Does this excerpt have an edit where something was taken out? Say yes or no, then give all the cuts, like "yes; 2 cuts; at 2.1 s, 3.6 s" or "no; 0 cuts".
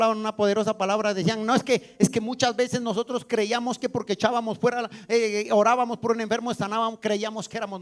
no; 0 cuts